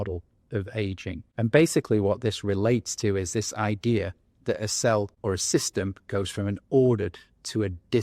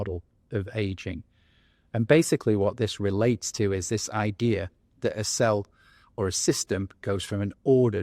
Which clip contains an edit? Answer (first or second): first